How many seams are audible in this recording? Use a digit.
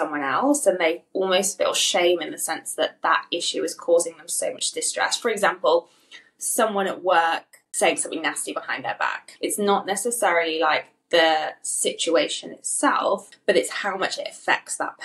3